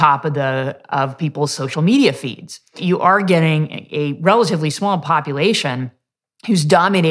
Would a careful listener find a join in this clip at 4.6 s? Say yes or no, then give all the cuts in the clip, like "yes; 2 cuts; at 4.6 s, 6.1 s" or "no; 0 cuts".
no; 1 cut; at 2.8 s